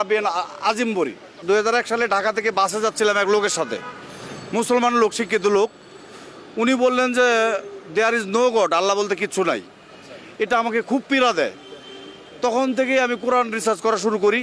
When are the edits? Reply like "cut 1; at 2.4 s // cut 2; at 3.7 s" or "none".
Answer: cut 1; at 1.4 s